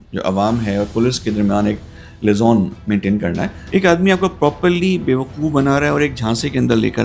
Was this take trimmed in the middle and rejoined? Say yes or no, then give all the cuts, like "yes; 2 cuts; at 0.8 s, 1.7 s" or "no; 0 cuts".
yes; 1 cut; at 3.5 s